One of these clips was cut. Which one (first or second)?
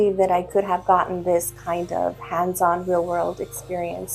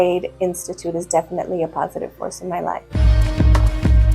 second